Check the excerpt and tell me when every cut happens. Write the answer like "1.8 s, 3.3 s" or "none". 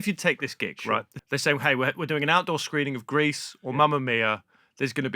1.1 s